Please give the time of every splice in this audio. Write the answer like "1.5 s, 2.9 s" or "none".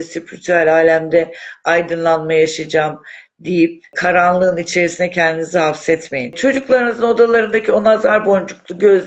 3.9 s, 6.4 s